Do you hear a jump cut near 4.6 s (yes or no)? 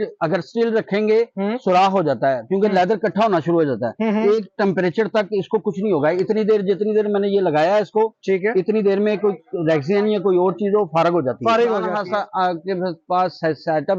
no